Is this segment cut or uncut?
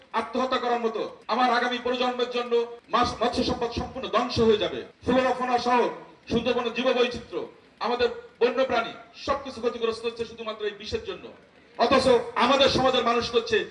cut